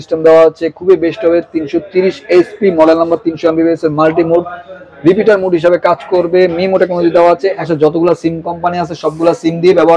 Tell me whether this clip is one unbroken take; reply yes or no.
no